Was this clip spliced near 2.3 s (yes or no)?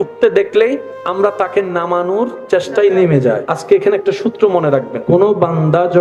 no